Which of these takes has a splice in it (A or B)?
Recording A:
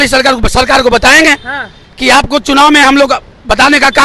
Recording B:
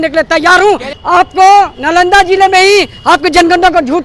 B